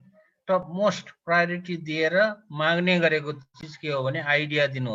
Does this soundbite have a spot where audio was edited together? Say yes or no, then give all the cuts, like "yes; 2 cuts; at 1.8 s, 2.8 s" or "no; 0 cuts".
no; 0 cuts